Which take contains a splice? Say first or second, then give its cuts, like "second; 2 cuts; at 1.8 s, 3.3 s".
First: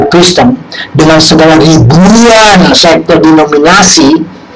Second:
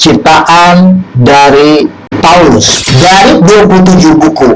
second; 2 cuts; at 2.0 s, 2.8 s